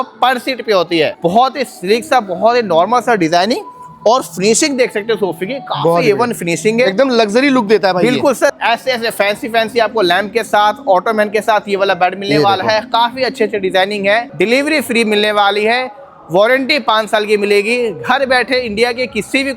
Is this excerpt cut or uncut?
cut